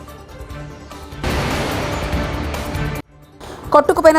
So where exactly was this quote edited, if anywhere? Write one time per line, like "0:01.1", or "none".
0:01.2
0:03.1